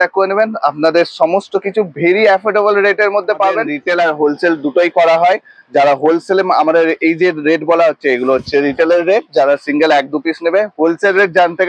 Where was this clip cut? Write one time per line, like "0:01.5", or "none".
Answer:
0:03.6